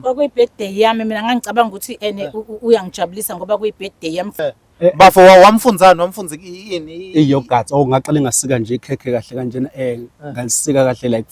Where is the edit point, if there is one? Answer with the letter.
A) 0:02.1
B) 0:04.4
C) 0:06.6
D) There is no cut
B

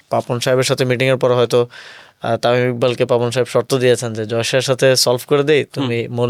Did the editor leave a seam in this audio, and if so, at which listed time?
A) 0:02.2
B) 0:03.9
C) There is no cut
C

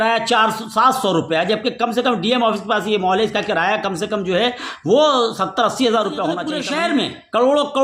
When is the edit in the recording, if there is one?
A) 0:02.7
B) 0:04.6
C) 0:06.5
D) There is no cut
C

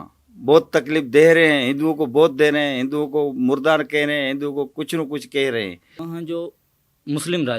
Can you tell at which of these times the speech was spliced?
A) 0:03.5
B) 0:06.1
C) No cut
B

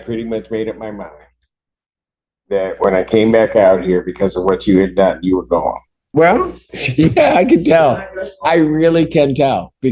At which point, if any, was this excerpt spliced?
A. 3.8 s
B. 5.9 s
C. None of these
B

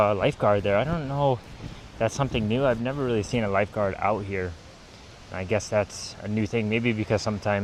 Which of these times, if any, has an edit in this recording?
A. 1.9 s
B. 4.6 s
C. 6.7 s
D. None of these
D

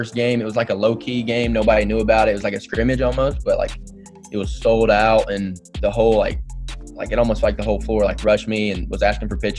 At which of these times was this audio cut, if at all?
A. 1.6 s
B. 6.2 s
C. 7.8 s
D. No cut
D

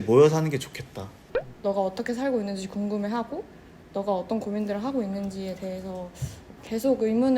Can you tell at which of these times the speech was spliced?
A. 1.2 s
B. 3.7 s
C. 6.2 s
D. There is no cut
A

